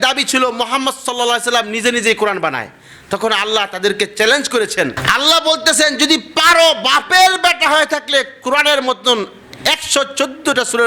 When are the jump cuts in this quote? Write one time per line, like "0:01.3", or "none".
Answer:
0:05.0